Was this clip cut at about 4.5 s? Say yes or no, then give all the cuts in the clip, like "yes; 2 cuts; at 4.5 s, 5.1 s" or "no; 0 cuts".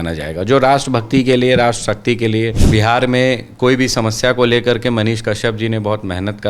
no; 1 cut; at 2.6 s